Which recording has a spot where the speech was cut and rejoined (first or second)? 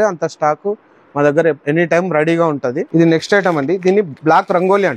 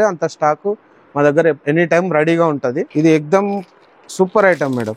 second